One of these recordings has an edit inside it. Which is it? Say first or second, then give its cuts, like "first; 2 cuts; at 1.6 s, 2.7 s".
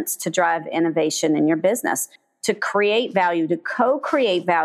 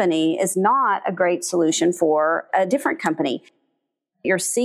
second; 2 cuts; at 2.5 s, 3.8 s